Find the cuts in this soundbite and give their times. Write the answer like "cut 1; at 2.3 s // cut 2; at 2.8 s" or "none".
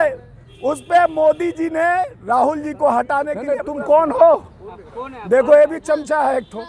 cut 1; at 3.6 s